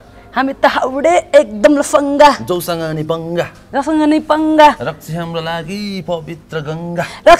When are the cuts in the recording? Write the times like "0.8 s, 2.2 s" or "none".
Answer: none